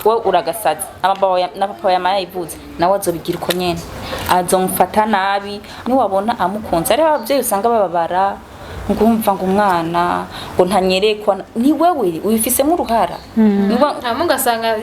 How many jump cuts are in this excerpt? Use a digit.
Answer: 1